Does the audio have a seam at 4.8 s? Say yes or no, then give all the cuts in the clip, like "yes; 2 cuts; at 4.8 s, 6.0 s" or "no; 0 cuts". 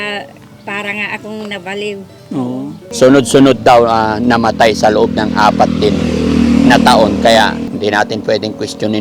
no; 2 cuts; at 2.8 s, 7.7 s